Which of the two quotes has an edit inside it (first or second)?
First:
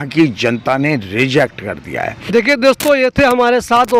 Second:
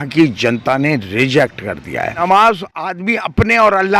second